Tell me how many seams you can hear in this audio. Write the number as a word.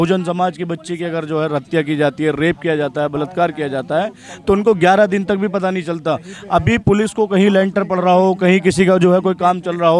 zero